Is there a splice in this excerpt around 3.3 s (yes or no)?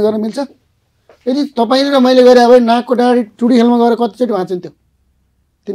no